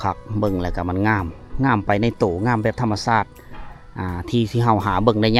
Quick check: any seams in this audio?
no; 0 cuts

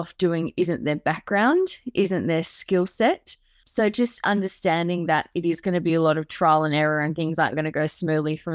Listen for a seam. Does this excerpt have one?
no; 0 cuts

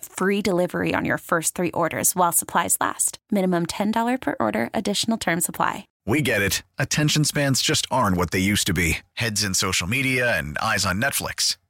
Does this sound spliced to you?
yes; 1 cut; at 5.9 s

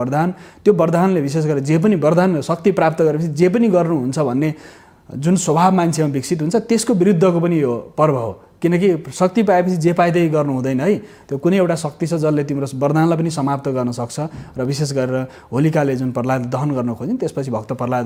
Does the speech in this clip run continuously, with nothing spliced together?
yes; 0 cuts

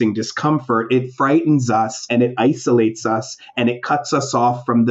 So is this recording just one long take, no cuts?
no; 1 cut; at 2.0 s

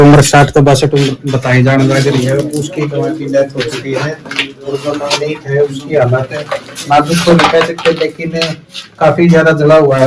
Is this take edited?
no; 0 cuts

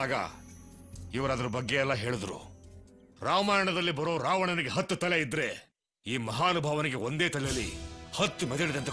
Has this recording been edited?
no; 0 cuts

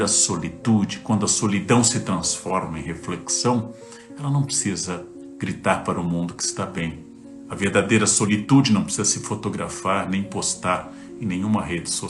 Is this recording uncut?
yes; 0 cuts

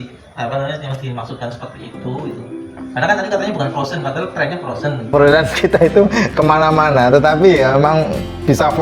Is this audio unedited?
no; 1 cut; at 5.1 s

